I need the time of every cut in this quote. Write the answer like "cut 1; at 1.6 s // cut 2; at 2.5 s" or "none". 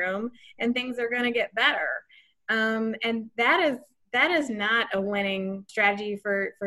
cut 1; at 5.7 s